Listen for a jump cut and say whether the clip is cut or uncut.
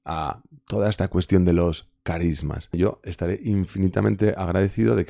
cut